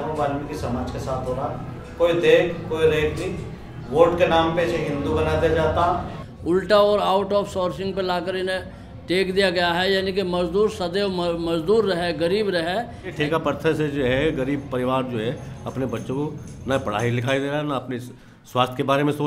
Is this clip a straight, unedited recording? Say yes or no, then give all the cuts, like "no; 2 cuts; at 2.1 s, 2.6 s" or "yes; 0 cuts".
no; 2 cuts; at 6.2 s, 13.1 s